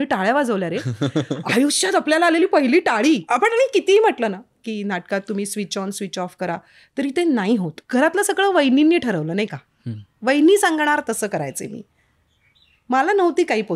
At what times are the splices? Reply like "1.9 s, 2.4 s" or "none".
3.3 s, 7.8 s